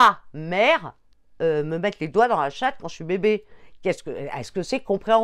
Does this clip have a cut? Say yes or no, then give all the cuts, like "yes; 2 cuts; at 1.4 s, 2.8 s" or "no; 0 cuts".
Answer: no; 0 cuts